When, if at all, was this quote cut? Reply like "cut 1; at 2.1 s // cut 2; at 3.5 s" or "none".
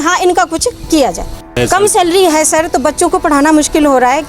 cut 1; at 1.5 s

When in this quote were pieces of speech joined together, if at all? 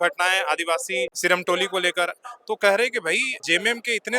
cut 1; at 1.1 s // cut 2; at 3.3 s

